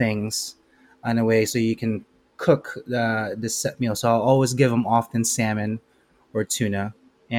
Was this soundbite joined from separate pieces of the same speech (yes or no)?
no